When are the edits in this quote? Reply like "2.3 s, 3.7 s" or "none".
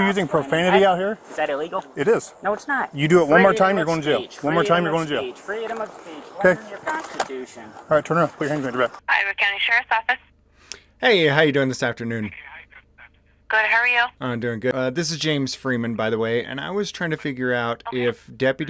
6.8 s, 9.0 s